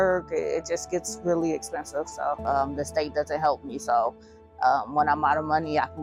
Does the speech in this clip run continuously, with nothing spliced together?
yes; 0 cuts

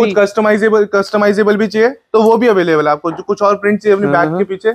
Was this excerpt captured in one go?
yes; 0 cuts

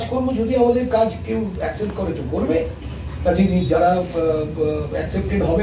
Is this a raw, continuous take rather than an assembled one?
yes; 0 cuts

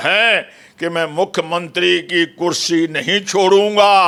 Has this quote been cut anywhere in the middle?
no; 0 cuts

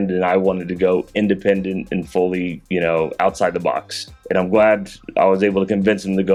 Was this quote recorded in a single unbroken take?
yes; 0 cuts

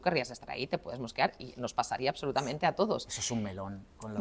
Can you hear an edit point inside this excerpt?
no; 0 cuts

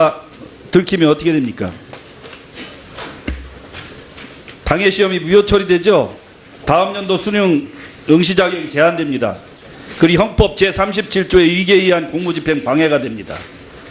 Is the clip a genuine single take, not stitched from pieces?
no; 1 cut; at 8.9 s

